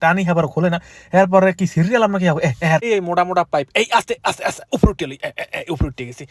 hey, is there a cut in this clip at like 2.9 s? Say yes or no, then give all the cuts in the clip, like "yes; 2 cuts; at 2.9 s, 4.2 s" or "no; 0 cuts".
yes; 1 cut; at 2.9 s